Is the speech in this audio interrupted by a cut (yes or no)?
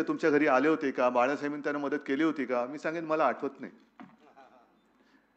no